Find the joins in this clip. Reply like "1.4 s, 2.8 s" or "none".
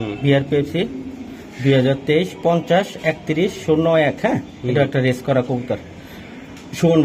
none

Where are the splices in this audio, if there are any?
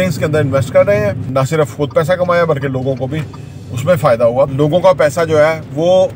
1.3 s, 4.5 s

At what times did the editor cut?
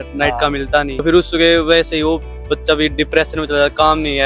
1.0 s

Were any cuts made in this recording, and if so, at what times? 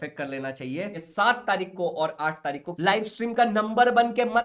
1.0 s, 2.7 s

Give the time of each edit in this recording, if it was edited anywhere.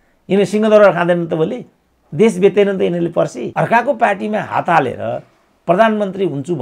3.4 s

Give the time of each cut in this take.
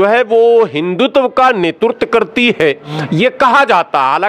none

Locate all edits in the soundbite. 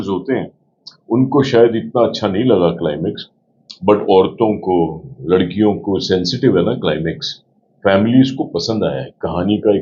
none

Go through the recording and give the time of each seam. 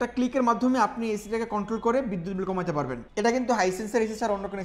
3.0 s

